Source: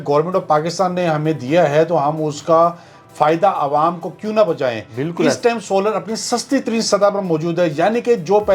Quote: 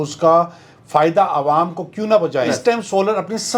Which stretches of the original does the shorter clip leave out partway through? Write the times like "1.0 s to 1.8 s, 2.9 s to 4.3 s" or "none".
4.8 s to 5.3 s